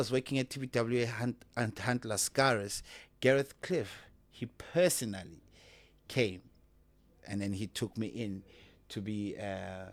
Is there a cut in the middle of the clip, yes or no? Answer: no